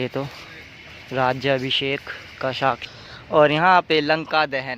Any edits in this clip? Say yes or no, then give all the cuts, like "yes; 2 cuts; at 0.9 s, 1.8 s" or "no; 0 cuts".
yes; 1 cut; at 2.8 s